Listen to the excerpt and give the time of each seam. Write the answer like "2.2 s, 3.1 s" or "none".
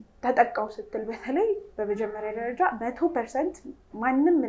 none